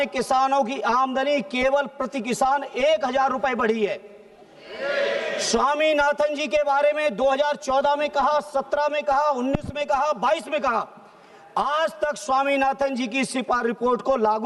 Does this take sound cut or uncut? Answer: uncut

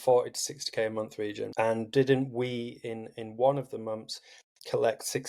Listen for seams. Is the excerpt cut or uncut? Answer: uncut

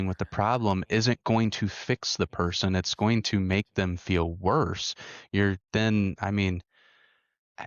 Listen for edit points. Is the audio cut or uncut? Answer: uncut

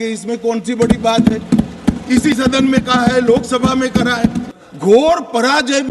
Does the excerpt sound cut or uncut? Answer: cut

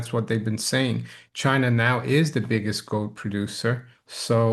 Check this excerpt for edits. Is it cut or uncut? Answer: uncut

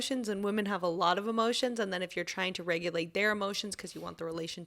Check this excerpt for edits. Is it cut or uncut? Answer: uncut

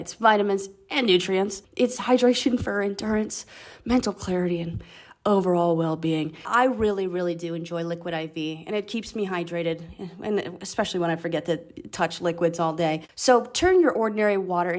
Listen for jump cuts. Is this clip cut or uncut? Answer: cut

